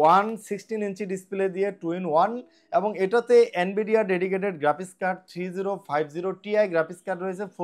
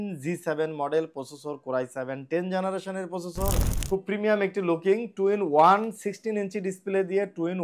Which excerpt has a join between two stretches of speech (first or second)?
second